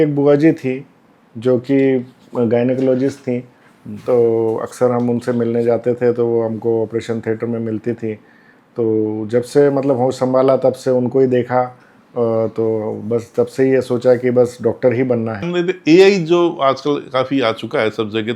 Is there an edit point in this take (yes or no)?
yes